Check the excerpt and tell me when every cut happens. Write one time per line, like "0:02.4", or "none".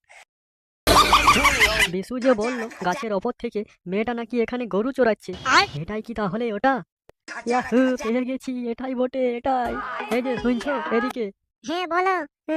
0:01.8